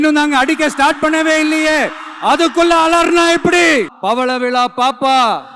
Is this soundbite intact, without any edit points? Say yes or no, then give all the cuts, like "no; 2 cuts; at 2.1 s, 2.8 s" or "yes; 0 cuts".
no; 1 cut; at 3.9 s